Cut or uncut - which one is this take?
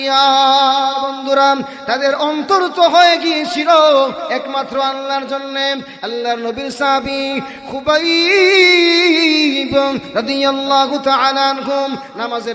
cut